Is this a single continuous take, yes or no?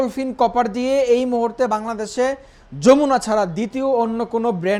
yes